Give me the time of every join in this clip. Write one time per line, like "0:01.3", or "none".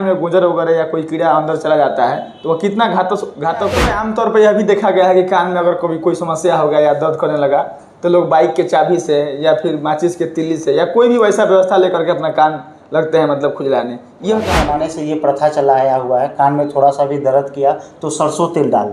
0:04.0
0:14.7